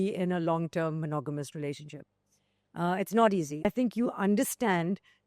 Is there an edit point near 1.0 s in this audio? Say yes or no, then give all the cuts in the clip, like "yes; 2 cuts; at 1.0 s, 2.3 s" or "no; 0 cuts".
no; 1 cut; at 3.5 s